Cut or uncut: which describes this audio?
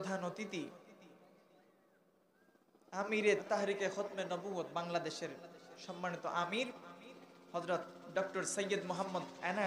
cut